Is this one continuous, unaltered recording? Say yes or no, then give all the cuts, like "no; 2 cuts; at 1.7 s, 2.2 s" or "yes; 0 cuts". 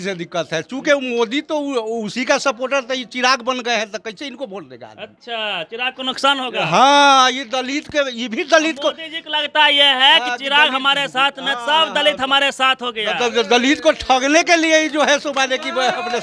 yes; 0 cuts